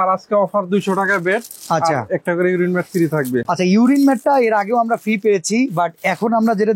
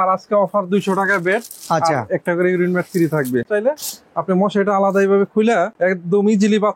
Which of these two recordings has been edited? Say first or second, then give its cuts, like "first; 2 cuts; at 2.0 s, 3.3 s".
second; 1 cut; at 3.4 s